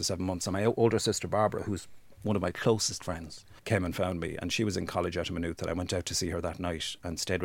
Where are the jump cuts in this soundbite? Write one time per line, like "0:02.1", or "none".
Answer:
0:03.5